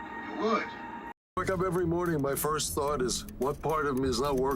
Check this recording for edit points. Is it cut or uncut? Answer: cut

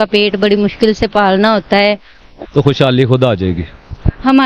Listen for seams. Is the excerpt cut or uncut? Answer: cut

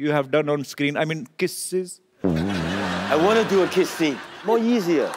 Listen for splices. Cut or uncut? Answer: cut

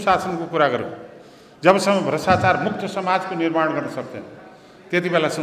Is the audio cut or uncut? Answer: uncut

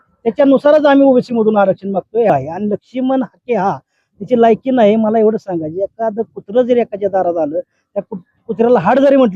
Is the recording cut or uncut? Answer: cut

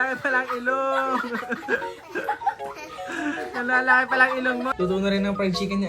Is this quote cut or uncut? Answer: cut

